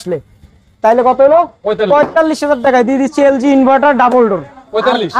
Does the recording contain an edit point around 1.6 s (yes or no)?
no